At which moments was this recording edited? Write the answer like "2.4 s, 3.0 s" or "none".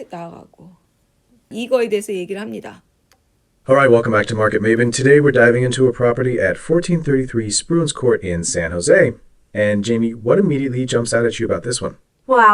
1.5 s